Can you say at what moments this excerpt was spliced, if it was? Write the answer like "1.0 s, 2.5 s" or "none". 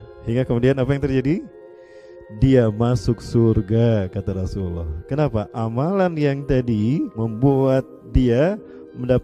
7.1 s

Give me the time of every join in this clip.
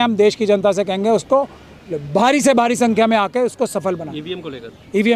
none

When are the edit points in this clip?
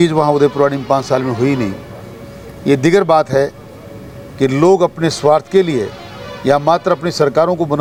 none

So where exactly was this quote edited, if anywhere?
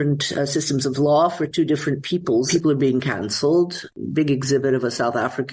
2.5 s, 3.9 s

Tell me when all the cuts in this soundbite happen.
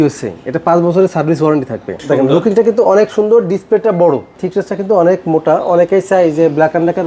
2.0 s, 4.4 s

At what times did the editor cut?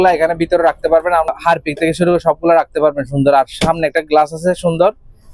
1.3 s

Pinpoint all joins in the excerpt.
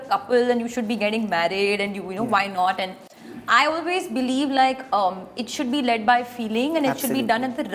none

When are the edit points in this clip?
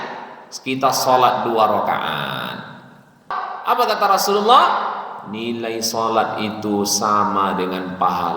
3.4 s

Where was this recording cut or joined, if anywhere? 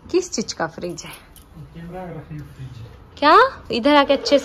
none

